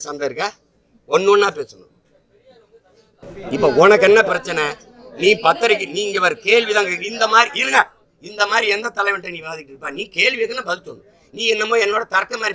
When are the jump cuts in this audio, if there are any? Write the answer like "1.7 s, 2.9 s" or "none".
3.1 s